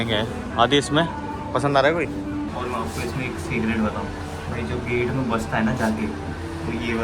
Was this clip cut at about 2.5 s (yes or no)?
yes